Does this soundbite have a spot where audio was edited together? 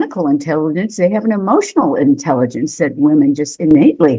no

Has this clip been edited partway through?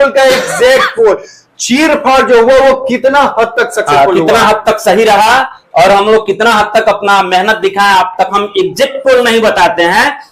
yes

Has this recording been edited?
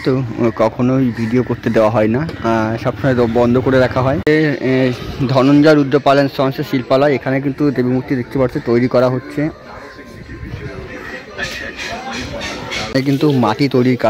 yes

